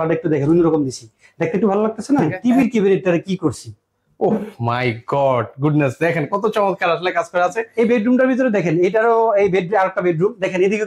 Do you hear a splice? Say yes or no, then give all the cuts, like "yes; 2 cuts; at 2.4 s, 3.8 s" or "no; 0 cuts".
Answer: yes; 2 cuts; at 2.3 s, 7.6 s